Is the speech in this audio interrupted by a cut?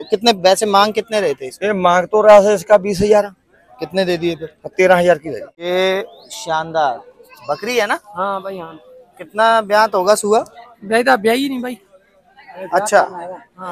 yes; 1 cut; at 5.6 s

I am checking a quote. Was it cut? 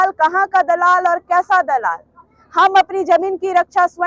no; 0 cuts

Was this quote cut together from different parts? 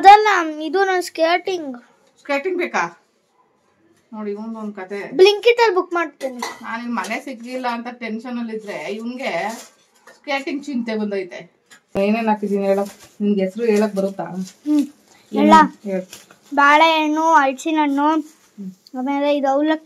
yes; 1 cut; at 12.0 s

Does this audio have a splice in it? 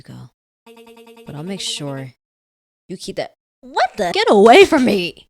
yes; 1 cut; at 4.1 s

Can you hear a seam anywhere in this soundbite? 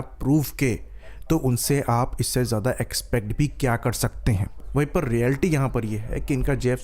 yes; 1 cut; at 3.1 s

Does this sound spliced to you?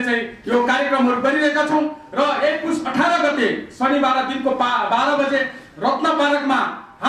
no; 0 cuts

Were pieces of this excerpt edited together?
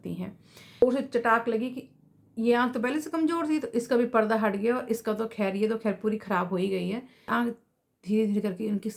yes; 2 cuts; at 0.8 s, 7.3 s

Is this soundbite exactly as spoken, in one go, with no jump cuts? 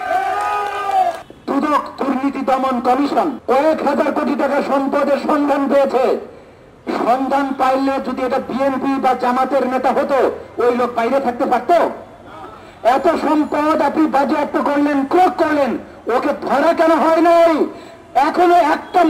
no; 2 cuts; at 1.3 s, 3.4 s

